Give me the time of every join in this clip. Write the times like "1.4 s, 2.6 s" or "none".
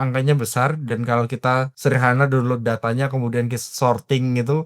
1.7 s